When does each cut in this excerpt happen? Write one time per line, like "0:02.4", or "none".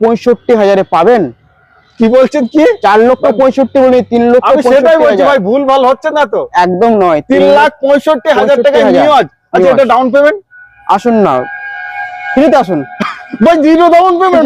none